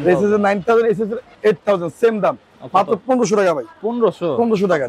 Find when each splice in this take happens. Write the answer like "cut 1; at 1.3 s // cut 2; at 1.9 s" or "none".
cut 1; at 1.2 s